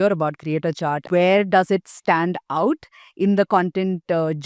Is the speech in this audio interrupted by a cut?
yes; 1 cut; at 1.0 s

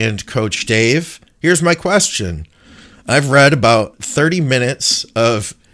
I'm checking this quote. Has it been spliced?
yes; 1 cut; at 4.0 s

